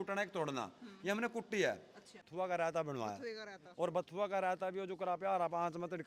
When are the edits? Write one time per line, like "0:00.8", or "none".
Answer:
0:02.2